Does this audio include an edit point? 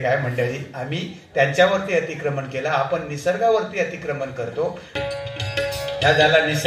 yes; 1 cut; at 4.9 s

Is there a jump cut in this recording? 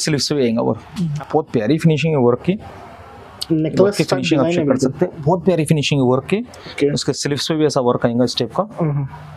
yes; 1 cut; at 1.2 s

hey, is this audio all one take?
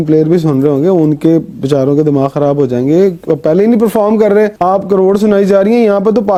yes; 0 cuts

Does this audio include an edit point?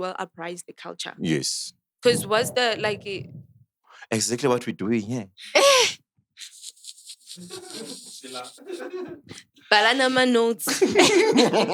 no; 0 cuts

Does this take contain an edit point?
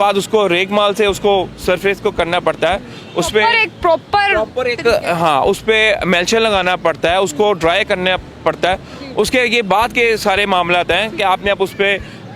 no; 0 cuts

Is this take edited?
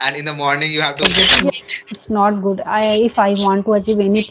yes; 1 cut; at 1.5 s

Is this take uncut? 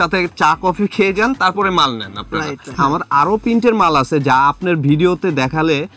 no; 1 cut; at 2.8 s

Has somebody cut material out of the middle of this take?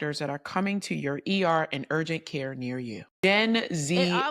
yes; 1 cut; at 3.1 s

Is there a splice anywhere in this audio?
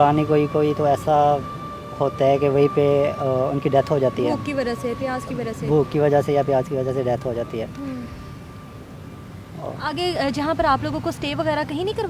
no; 0 cuts

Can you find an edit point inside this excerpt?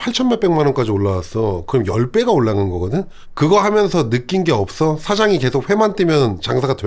no; 0 cuts

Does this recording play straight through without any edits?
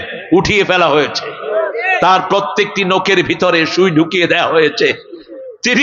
yes; 0 cuts

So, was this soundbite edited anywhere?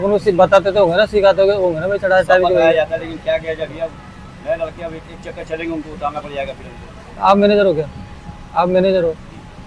no; 0 cuts

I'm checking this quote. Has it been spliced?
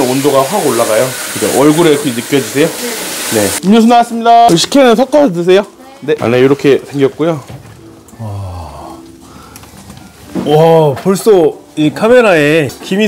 yes; 2 cuts; at 3.6 s, 6.2 s

